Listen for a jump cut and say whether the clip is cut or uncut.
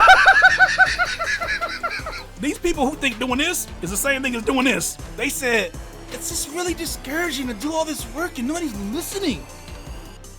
cut